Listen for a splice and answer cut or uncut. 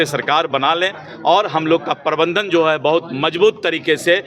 uncut